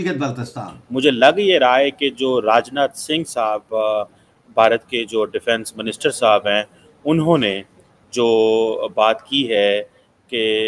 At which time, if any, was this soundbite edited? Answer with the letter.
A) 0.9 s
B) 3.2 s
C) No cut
A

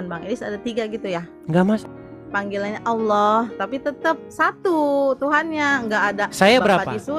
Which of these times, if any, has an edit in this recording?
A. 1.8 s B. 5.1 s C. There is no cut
A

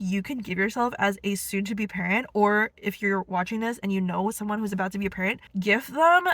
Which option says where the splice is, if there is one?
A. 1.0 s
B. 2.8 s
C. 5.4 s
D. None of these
D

